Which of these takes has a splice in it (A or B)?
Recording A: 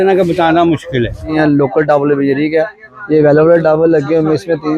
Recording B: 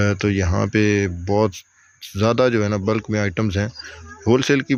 A